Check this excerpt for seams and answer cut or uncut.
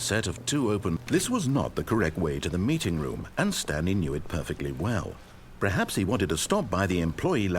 cut